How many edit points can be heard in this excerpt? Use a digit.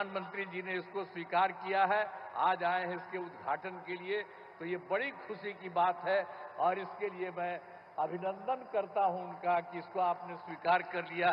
0